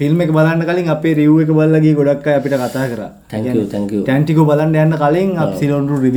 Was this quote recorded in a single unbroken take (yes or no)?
yes